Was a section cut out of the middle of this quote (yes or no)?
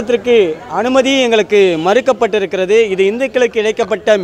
no